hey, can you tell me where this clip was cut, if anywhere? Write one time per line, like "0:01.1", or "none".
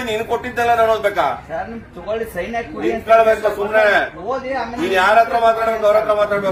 none